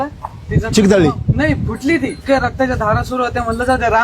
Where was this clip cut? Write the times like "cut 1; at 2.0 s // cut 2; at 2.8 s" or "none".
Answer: cut 1; at 2.2 s